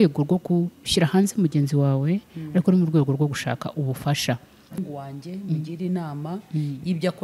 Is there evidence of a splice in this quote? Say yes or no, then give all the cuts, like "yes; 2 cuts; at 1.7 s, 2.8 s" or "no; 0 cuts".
yes; 1 cut; at 4.8 s